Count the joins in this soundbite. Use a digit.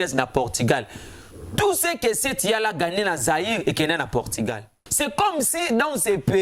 1